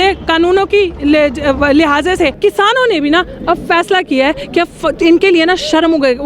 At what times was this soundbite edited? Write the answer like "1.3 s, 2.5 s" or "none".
2.4 s

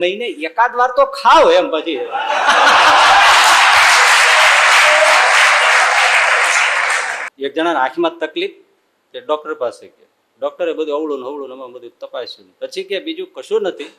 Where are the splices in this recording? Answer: 7.2 s

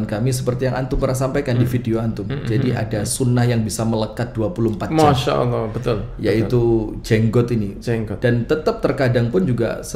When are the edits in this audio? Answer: none

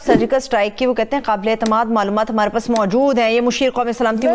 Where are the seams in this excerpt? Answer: none

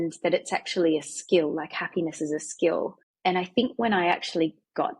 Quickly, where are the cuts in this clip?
3.0 s

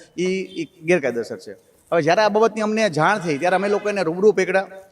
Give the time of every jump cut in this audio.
none

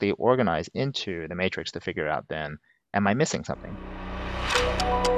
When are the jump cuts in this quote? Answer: 3.7 s

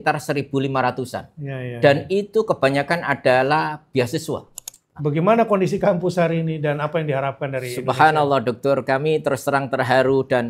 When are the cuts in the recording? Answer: 4.6 s

